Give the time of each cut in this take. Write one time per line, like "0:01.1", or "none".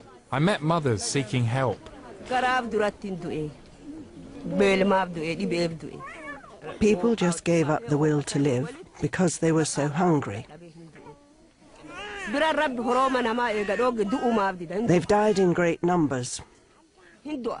none